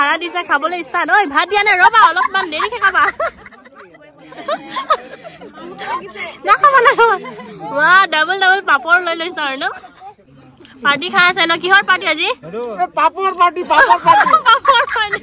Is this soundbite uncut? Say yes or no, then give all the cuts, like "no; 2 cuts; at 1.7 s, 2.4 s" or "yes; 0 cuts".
no; 1 cut; at 10.2 s